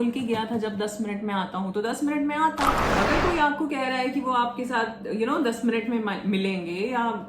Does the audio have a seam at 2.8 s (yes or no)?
yes